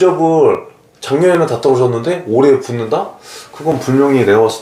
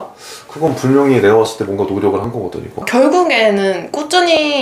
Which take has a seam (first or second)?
second